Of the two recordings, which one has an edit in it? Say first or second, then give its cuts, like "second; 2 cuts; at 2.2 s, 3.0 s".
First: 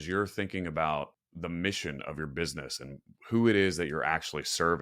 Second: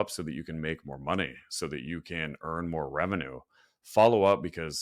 first; 1 cut; at 1.2 s